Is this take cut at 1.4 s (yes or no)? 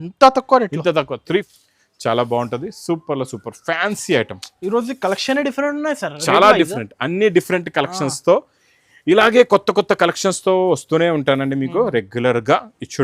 yes